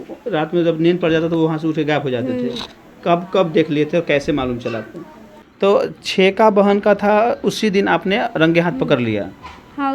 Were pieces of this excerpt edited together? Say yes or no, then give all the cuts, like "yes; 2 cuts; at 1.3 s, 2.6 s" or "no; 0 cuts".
yes; 1 cut; at 5.4 s